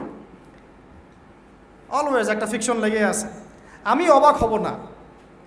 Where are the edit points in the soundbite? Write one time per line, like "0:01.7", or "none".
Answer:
none